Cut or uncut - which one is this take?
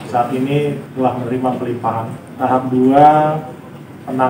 cut